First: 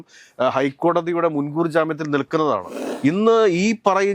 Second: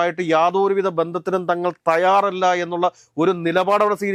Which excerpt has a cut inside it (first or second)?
first